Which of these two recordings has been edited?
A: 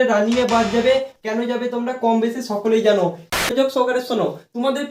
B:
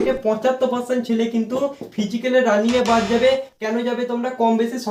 A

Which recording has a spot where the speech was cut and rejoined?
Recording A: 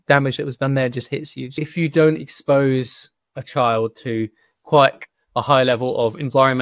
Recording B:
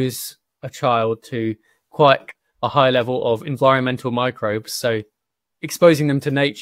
A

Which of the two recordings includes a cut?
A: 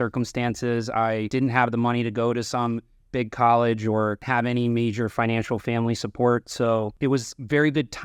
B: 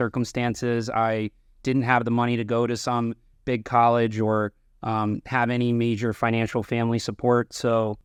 A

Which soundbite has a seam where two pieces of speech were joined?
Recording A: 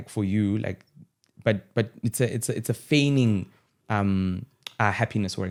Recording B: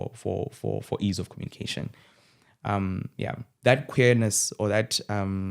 B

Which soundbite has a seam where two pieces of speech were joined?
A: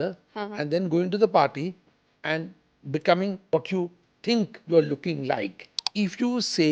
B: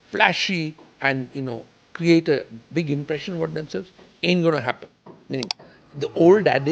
A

